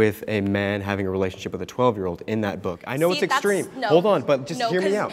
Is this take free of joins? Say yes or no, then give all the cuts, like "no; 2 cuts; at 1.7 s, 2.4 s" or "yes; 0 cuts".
yes; 0 cuts